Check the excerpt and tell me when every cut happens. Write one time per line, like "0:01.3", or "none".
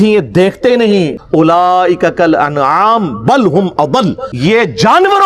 0:01.5
0:04.3